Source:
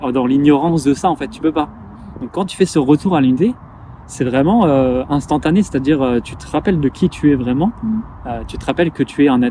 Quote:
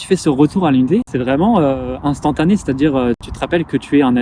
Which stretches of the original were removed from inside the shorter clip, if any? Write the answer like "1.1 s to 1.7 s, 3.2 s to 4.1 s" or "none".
3.6 s to 4.2 s, 6.4 s to 8.6 s